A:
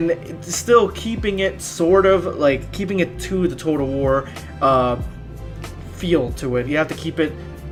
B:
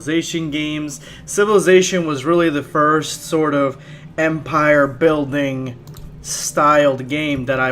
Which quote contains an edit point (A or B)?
B